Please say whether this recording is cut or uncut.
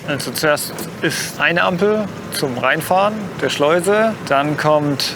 cut